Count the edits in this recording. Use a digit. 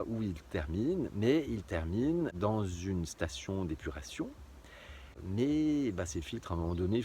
1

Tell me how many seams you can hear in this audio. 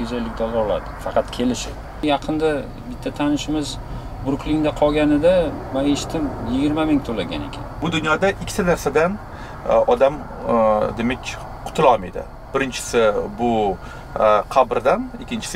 2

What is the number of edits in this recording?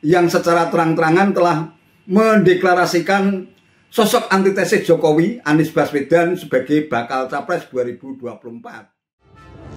1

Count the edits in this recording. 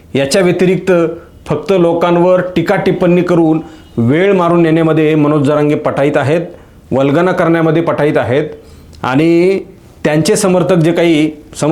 0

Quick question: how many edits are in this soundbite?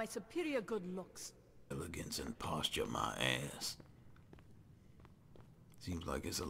1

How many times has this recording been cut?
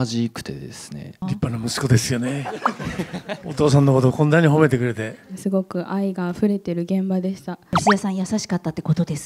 3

